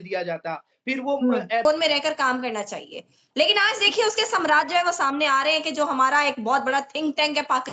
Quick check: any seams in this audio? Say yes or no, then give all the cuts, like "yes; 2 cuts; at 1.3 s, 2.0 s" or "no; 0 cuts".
yes; 1 cut; at 1.6 s